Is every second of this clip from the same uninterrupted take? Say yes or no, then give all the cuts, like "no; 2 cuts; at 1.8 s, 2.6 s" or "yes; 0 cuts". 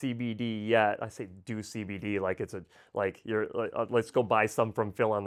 yes; 0 cuts